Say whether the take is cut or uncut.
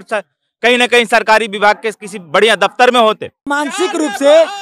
cut